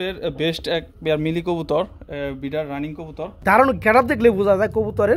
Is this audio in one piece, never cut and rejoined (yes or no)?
no